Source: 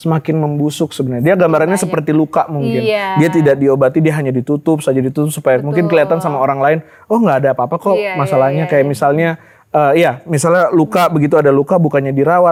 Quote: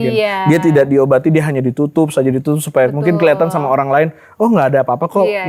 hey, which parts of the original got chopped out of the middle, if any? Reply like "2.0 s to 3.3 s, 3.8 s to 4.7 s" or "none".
none